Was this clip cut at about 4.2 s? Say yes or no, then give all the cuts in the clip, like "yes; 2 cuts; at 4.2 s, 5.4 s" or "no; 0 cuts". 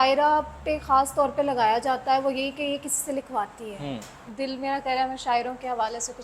yes; 1 cut; at 4.2 s